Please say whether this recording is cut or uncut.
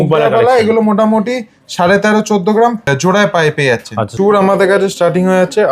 cut